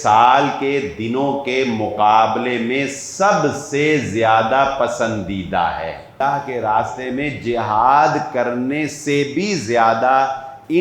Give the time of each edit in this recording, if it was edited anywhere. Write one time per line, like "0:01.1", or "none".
0:06.1

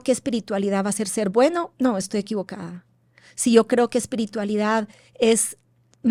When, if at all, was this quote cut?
none

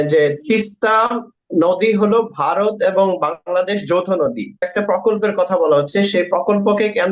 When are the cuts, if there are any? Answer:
0:04.7

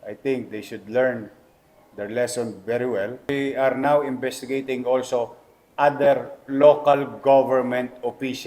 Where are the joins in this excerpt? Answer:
0:03.3

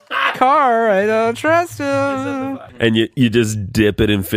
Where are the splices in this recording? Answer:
0:02.4

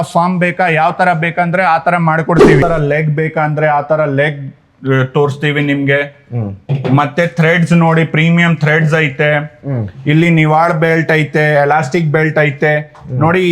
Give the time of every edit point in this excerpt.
0:02.6

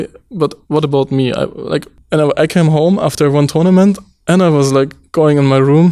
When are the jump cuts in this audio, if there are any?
0:01.9

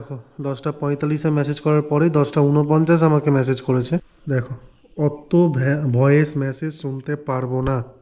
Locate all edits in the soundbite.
0:04.1

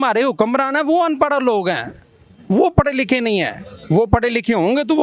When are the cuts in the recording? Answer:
none

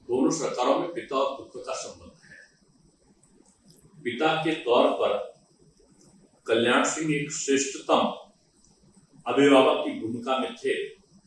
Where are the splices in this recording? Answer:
none

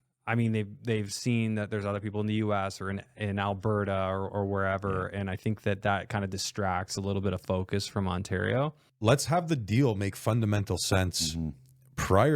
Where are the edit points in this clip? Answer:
0:08.8

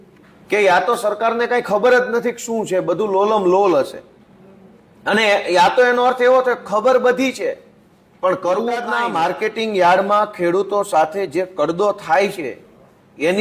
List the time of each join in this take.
0:08.9

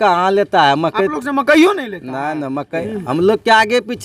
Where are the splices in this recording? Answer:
0:02.8

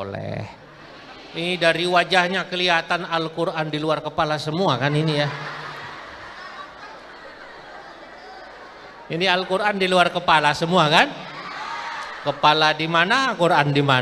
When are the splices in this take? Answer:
none

